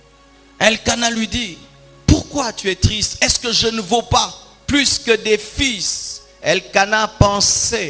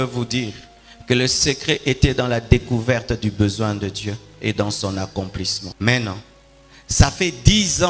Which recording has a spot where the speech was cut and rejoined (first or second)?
second